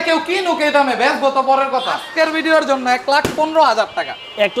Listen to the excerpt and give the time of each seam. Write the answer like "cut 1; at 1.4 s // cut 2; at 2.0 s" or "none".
cut 1; at 2.0 s